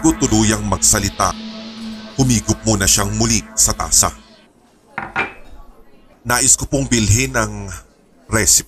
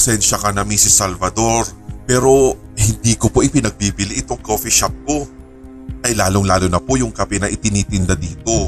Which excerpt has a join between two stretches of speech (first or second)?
first